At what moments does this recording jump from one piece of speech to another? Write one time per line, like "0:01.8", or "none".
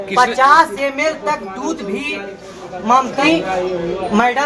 0:03.2